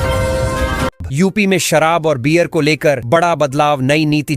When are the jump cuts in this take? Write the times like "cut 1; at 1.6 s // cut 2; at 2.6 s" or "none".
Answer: cut 1; at 1.0 s